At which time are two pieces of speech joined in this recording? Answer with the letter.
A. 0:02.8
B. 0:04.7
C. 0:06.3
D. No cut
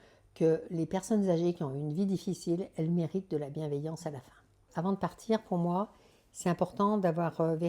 B